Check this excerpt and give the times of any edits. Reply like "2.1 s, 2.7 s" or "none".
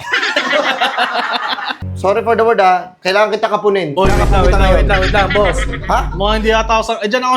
1.8 s